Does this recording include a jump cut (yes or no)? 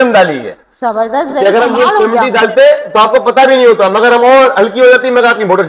no